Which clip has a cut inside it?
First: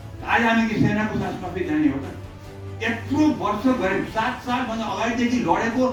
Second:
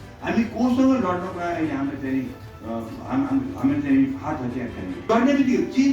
second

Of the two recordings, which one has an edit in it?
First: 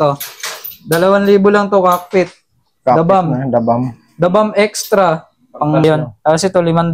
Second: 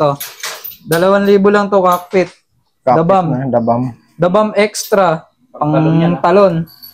first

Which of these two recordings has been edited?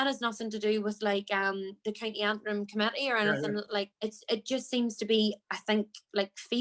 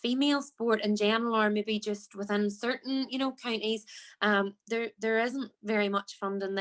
first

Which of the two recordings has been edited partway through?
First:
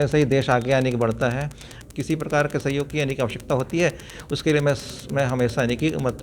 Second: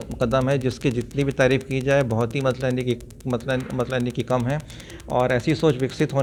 first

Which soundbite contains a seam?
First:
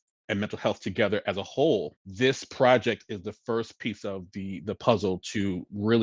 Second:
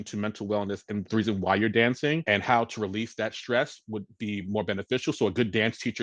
first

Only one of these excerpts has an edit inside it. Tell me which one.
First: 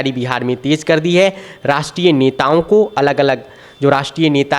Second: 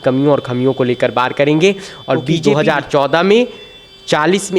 second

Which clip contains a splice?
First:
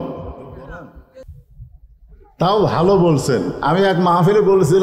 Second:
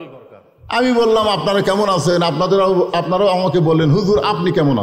first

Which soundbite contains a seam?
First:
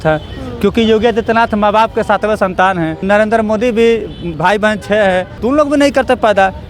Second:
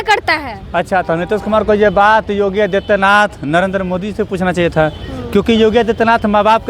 first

